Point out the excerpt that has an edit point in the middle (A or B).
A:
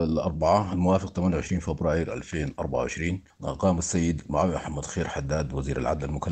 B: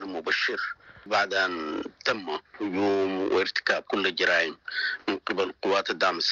A